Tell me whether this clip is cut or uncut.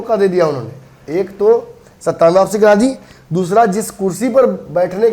uncut